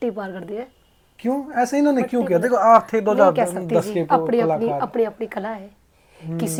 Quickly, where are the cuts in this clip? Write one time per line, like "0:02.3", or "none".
none